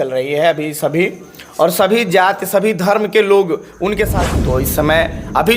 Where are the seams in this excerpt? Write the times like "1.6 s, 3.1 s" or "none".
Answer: 4.2 s